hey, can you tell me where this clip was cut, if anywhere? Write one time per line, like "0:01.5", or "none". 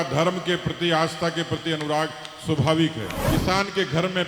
0:03.2